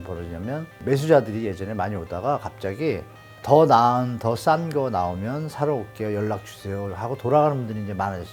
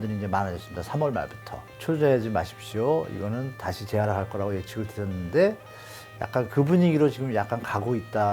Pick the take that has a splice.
second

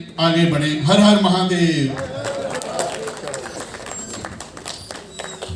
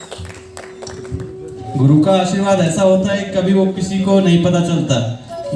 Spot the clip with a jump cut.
second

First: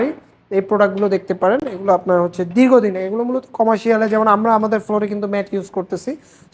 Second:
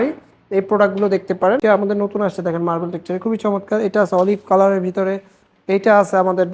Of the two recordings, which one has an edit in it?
second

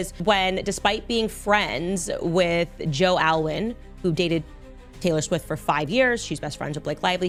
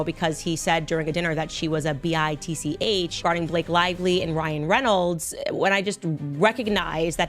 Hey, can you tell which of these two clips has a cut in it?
second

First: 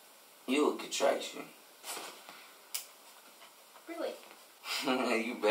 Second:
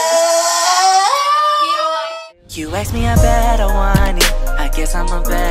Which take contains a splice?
second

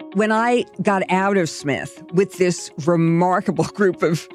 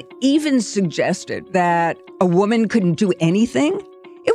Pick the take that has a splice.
second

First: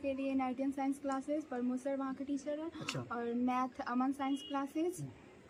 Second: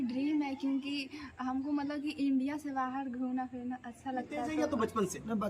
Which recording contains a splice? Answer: second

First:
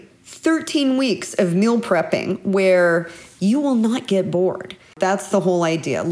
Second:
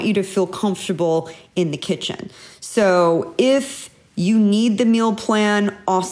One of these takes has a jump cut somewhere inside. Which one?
first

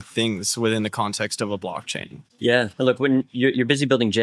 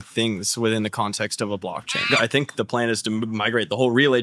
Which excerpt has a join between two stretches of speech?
second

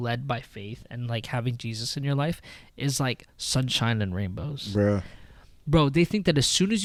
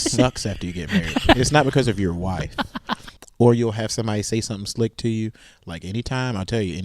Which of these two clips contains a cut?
second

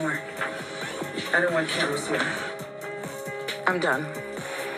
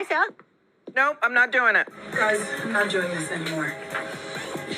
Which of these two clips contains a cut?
second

